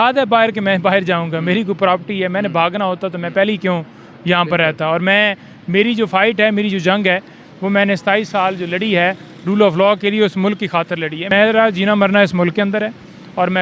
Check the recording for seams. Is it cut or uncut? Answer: cut